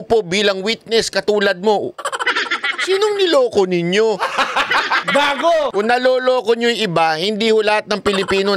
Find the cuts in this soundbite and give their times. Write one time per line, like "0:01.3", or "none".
none

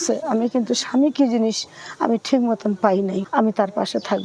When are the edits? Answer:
0:03.2

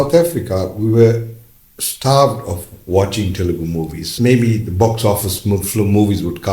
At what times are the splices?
0:04.1

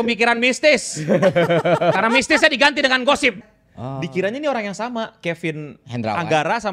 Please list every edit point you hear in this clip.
0:03.4

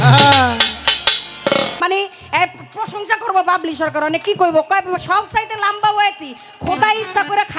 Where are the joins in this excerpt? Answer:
0:01.8

